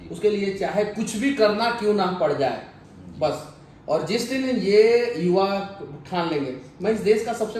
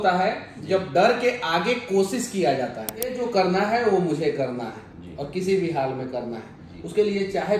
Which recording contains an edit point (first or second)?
second